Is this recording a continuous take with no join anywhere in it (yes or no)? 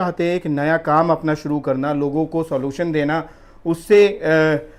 yes